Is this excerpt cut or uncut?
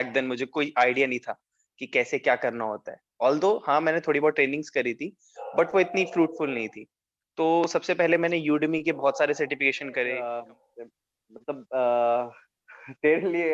cut